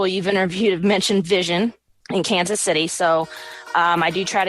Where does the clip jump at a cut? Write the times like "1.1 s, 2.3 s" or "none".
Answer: 1.9 s